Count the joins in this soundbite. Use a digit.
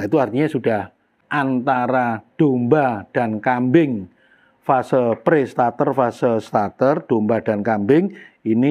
1